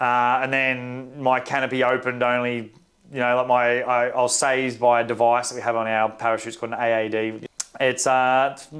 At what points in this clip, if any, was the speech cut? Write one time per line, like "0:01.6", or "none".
0:07.4